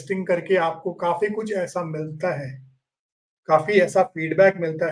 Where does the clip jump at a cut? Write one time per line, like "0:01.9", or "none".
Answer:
none